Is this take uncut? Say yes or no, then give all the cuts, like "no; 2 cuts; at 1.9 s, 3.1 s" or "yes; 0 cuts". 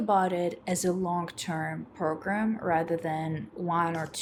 yes; 0 cuts